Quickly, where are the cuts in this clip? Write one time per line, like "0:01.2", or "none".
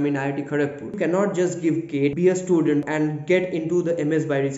0:01.0
0:02.2
0:02.9